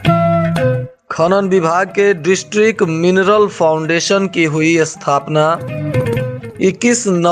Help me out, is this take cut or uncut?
cut